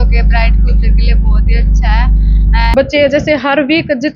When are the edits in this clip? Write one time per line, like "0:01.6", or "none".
0:02.7